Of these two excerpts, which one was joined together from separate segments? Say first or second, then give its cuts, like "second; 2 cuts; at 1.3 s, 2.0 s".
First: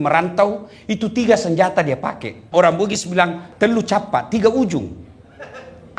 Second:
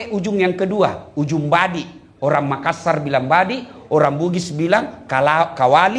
first; 2 cuts; at 2.5 s, 3.4 s